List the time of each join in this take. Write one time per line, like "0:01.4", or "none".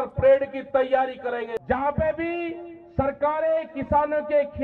0:01.6